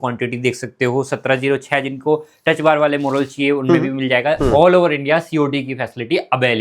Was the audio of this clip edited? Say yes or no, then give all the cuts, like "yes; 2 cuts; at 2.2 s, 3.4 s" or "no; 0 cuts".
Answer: yes; 1 cut; at 4.4 s